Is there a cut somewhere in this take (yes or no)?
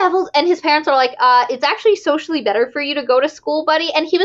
no